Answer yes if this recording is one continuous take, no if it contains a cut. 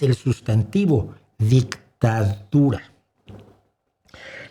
yes